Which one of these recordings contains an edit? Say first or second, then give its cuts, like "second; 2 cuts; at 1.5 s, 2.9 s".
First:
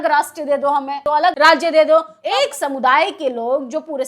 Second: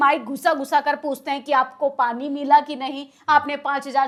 first; 2 cuts; at 1.1 s, 2.2 s